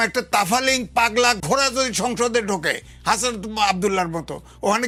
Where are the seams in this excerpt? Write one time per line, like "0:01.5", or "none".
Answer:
none

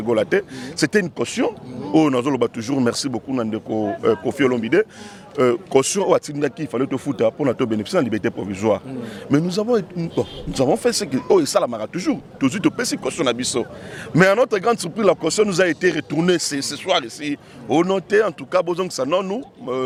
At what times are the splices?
none

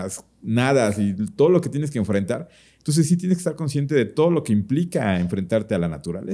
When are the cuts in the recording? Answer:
none

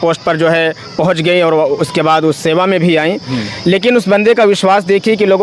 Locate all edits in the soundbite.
none

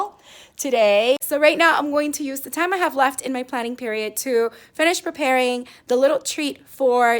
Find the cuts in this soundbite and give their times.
0:01.2

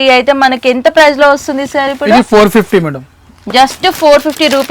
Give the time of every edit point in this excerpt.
none

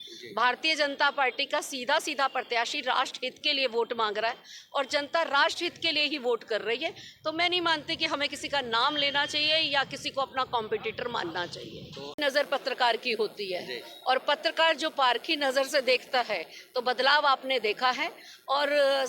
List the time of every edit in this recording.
0:12.2

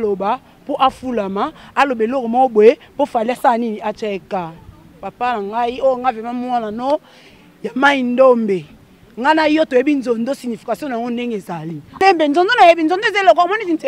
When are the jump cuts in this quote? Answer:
0:12.0

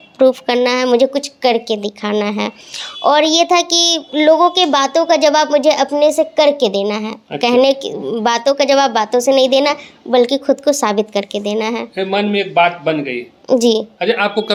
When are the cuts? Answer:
none

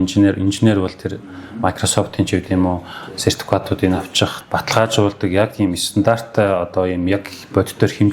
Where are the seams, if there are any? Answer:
0:04.4

